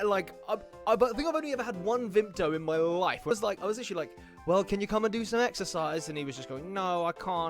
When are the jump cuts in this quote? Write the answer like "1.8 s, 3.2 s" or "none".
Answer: 3.3 s